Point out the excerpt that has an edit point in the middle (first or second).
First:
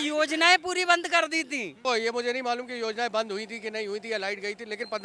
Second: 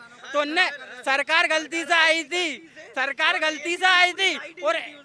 first